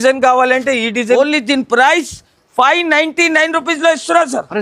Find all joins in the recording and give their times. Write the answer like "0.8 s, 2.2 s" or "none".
1.2 s

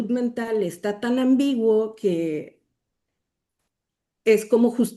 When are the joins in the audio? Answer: none

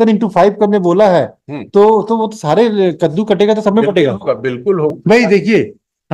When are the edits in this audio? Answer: 4.9 s

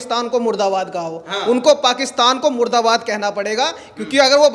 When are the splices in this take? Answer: none

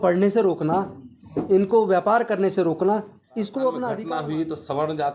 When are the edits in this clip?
4.0 s

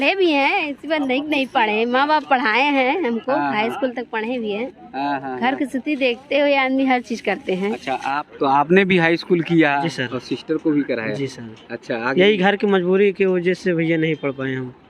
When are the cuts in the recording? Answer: 8.2 s

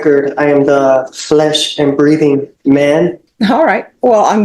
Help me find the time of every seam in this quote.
3.3 s

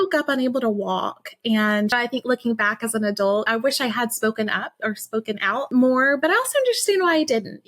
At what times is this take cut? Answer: 1.9 s, 3.5 s, 5.7 s

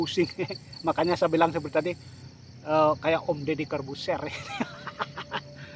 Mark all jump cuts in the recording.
none

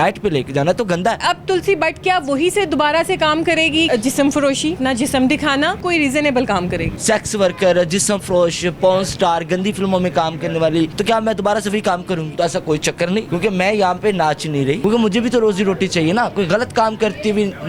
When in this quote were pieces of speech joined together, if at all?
1.2 s, 3.9 s, 4.8 s, 5.8 s, 6.9 s, 11.0 s, 12.3 s, 13.3 s, 14.8 s

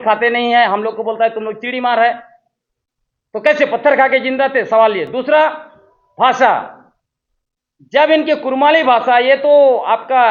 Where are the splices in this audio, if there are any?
none

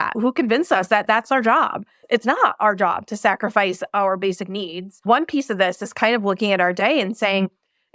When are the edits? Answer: 5.0 s

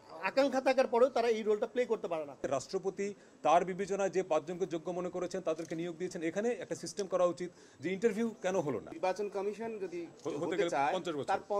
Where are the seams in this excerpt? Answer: 2.5 s, 9.0 s

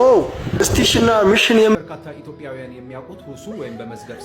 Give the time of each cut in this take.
1.7 s

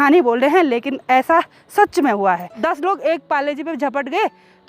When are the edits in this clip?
2.6 s

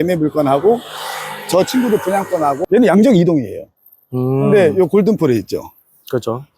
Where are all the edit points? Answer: 2.6 s

